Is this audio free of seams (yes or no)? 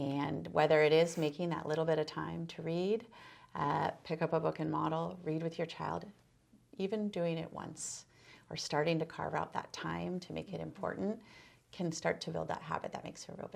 yes